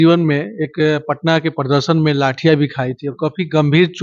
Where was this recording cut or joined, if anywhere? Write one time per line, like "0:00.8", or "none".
none